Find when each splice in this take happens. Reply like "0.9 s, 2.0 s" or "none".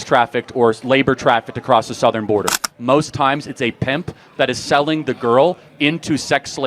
2.7 s